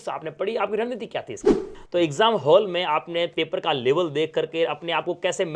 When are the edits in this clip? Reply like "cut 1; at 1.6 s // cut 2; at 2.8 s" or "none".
cut 1; at 1.7 s